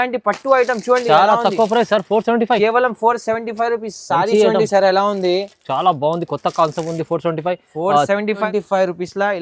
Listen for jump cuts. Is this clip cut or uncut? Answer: cut